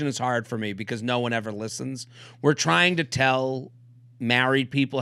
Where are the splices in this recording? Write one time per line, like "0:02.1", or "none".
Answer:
none